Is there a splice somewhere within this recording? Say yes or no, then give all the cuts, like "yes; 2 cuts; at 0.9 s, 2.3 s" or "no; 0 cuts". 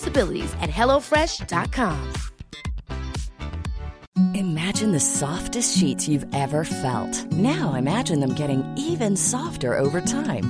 yes; 1 cut; at 3.9 s